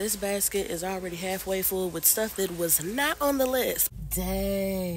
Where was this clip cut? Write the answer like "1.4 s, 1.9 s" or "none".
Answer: 3.8 s